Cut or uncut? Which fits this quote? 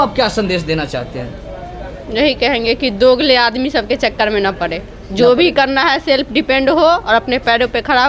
uncut